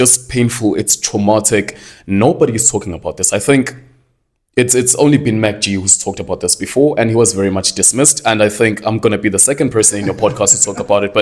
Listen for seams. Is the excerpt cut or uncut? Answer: uncut